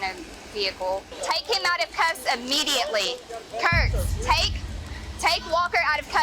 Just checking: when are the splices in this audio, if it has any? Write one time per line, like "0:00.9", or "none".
0:01.1